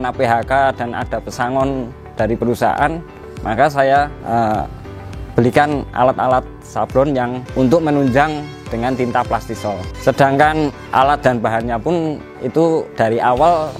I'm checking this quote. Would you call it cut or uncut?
cut